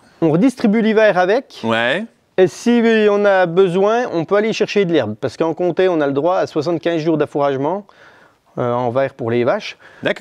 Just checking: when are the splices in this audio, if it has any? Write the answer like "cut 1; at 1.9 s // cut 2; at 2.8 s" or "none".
none

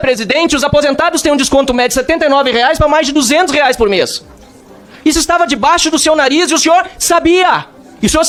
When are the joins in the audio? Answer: none

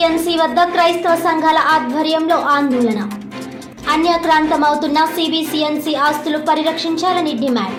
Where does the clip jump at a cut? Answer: none

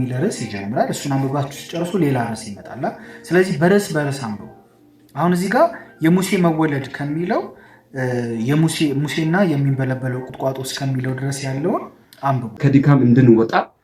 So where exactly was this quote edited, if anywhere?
cut 1; at 12.6 s

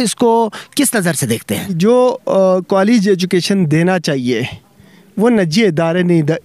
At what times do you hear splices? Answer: cut 1; at 1.7 s

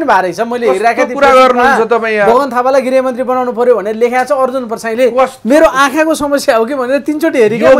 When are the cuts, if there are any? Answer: none

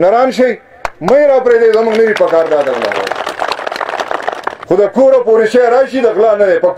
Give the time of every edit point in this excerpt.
cut 1; at 4.6 s

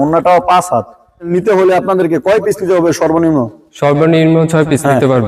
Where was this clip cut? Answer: cut 1; at 1.3 s

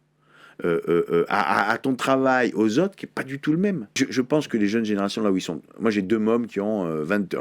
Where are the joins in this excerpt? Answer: cut 1; at 4.0 s

